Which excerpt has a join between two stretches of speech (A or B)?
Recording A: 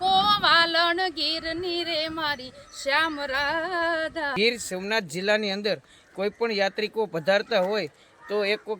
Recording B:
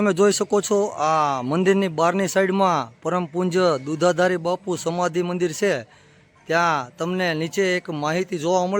A